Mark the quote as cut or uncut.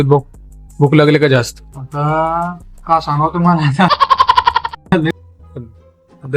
cut